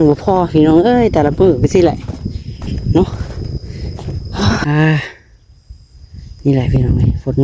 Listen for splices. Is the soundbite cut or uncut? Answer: cut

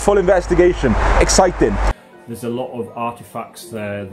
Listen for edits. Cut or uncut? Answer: cut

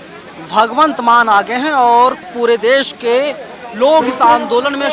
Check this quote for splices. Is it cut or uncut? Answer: cut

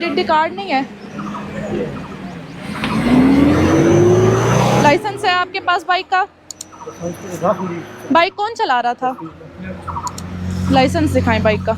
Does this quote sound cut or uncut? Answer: uncut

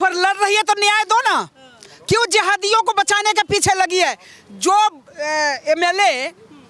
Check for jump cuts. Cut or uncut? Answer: uncut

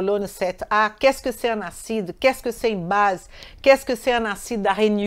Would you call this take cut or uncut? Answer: uncut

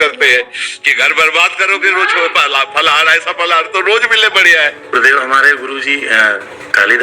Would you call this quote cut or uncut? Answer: cut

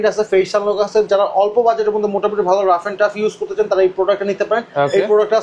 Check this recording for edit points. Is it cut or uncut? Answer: uncut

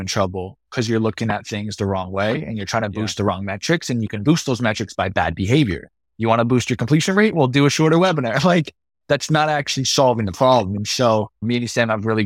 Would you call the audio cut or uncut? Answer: uncut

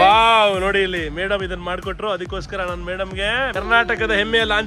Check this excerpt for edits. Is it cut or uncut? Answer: cut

